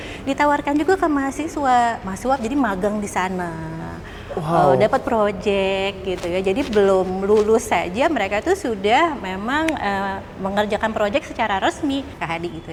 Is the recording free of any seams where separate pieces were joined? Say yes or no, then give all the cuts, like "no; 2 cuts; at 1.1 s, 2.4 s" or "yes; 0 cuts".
yes; 0 cuts